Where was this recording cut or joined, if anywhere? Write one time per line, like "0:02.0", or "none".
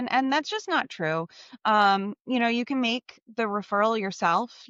none